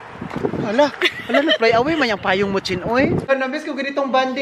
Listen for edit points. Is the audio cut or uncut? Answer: cut